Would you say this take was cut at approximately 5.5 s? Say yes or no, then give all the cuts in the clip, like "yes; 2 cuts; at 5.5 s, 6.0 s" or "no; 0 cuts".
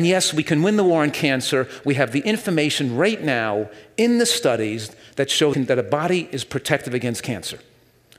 yes; 1 cut; at 5.5 s